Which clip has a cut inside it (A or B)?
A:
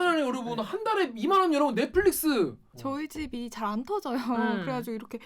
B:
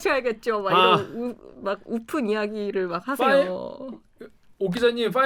A